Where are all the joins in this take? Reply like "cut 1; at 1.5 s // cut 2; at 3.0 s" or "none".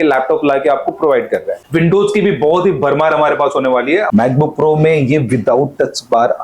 cut 1; at 1.6 s // cut 2; at 4.1 s